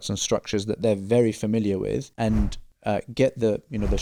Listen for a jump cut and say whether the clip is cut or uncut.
uncut